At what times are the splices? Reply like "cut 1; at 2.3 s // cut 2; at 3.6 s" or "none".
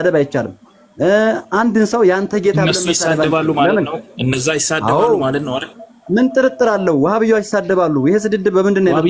none